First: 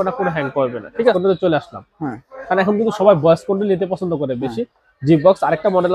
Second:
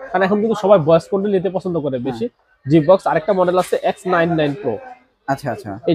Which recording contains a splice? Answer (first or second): first